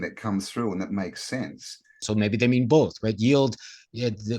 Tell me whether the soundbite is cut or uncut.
cut